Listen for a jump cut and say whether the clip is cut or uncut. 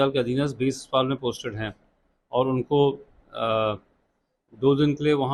uncut